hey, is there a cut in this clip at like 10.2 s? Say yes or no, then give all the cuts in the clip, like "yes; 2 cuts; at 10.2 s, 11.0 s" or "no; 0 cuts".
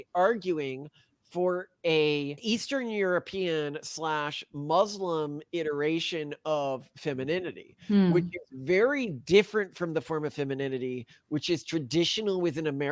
no; 0 cuts